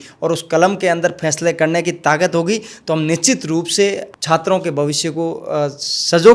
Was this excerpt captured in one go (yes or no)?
no